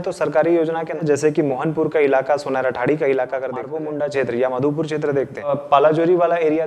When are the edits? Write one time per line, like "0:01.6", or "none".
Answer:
0:01.0
0:03.7
0:05.5